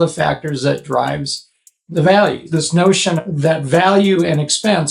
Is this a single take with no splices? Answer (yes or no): no